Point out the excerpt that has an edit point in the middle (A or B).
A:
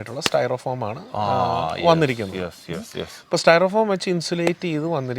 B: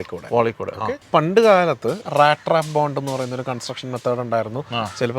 B